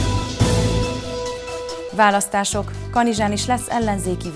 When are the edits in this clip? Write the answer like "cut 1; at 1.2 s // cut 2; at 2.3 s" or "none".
cut 1; at 1.6 s